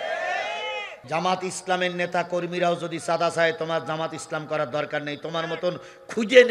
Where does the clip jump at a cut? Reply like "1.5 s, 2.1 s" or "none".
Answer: 0.9 s